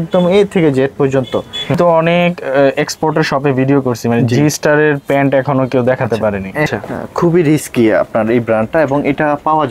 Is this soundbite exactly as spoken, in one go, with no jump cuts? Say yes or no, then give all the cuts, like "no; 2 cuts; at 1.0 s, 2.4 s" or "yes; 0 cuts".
no; 2 cuts; at 1.8 s, 6.7 s